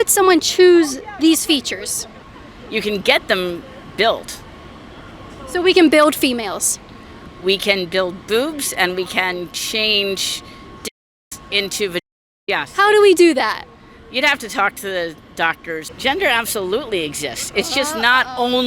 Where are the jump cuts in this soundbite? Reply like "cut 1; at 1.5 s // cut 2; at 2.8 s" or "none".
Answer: cut 1; at 15.9 s